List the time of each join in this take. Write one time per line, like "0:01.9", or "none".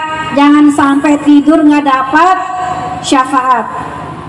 none